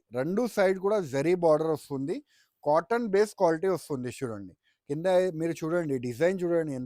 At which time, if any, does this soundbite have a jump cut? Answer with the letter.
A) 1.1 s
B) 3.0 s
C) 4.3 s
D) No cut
D